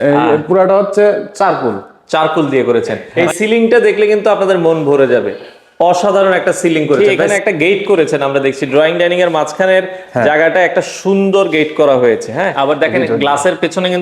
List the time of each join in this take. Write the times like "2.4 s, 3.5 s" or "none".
3.0 s, 7.3 s, 12.5 s